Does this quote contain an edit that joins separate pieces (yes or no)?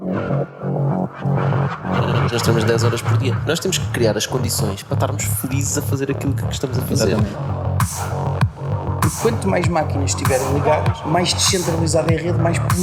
no